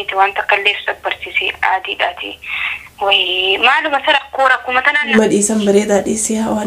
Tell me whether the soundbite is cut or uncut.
cut